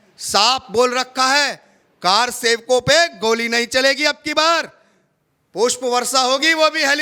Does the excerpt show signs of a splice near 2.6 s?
no; 0 cuts

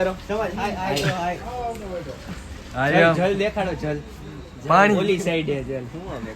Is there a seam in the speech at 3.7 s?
yes; 1 cut; at 3.7 s

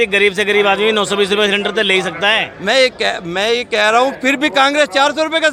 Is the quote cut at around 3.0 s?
no; 0 cuts

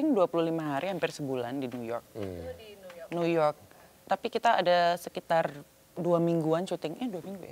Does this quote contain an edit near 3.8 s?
no; 0 cuts

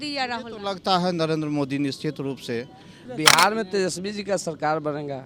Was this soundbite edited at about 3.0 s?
yes; 1 cut; at 3.0 s

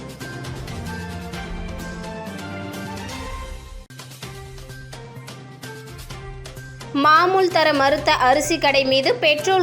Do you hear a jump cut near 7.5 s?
no; 1 cut; at 1.9 s

